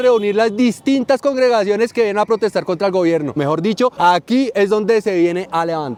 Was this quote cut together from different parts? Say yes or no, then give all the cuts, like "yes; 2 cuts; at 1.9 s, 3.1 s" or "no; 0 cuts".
no; 0 cuts